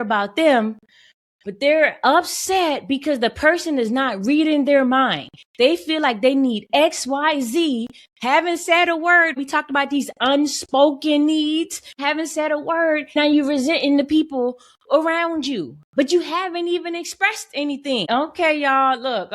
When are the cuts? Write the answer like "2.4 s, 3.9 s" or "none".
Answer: 9.4 s, 11.9 s, 13.2 s, 18.1 s